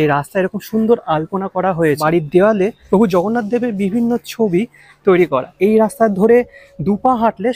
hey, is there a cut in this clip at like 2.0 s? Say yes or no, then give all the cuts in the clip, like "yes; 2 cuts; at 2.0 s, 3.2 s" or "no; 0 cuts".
yes; 3 cuts; at 2.0 s, 2.8 s, 5.5 s